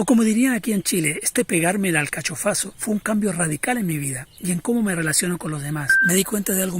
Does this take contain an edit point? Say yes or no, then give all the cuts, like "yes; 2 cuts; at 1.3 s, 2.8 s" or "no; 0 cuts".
yes; 1 cut; at 5.9 s